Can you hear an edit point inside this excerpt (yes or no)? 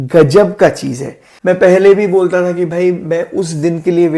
yes